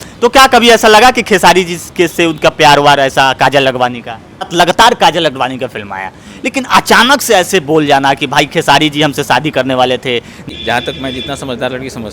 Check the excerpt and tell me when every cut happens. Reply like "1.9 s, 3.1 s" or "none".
4.5 s, 10.5 s